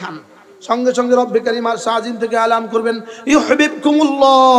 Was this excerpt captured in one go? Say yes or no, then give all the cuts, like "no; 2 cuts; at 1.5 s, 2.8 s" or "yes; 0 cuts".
yes; 0 cuts